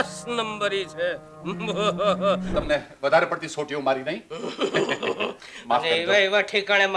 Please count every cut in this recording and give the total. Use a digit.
1